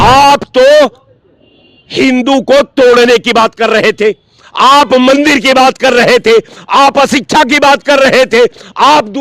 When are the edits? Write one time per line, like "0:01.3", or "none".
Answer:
none